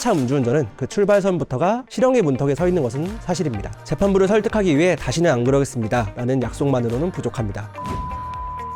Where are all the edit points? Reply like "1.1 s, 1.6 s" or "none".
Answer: 3.7 s